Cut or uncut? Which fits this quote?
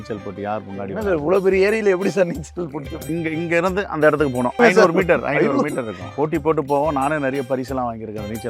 cut